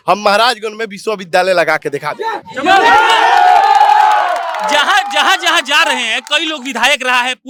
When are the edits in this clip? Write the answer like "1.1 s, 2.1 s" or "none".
none